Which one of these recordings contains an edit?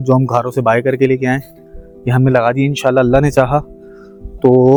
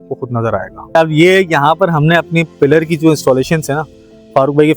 second; 1 cut; at 0.9 s

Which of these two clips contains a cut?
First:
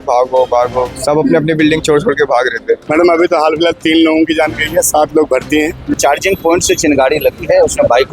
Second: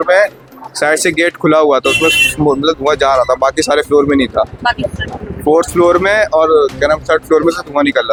first; 2 cuts; at 2.8 s, 5.9 s

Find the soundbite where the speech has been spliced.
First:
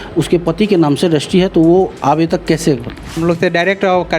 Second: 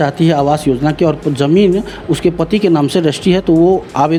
first; 1 cut; at 3.2 s

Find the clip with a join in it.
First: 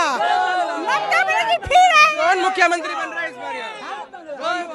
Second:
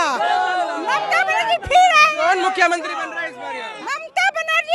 second; 1 cut; at 3.8 s

